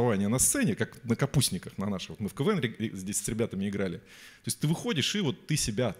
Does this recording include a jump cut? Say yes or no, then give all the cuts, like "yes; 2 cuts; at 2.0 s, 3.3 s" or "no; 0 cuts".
no; 0 cuts